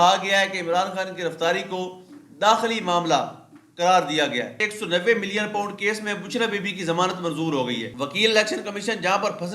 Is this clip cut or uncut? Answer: cut